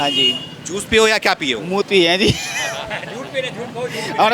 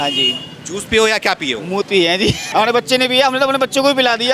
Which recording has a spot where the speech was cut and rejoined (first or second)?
second